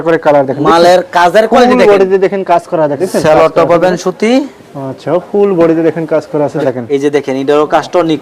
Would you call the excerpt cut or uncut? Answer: cut